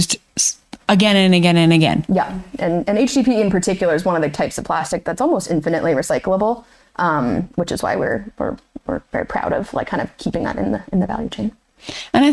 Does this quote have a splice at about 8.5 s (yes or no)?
no